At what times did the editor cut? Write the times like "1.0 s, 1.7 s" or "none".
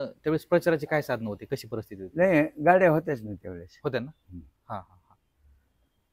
none